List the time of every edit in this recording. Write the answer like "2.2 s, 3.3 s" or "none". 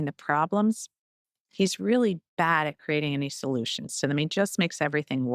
none